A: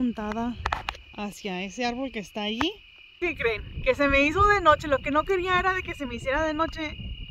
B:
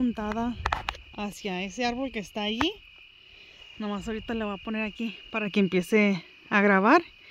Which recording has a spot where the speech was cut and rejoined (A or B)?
A